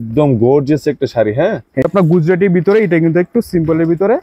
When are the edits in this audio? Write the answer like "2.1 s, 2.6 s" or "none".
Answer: 1.8 s